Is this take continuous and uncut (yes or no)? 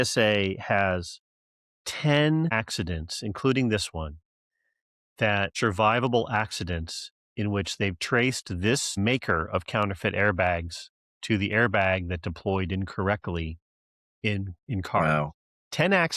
no